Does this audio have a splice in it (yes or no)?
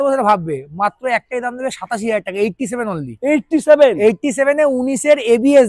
no